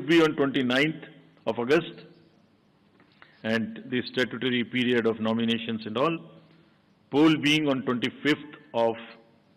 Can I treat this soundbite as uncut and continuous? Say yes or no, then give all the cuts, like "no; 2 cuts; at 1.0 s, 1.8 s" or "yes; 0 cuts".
yes; 0 cuts